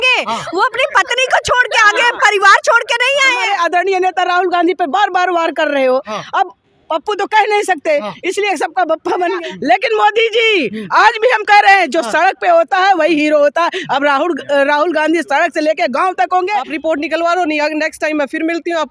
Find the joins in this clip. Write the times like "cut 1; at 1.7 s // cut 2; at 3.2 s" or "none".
cut 1; at 3.4 s // cut 2; at 9.3 s // cut 3; at 16.7 s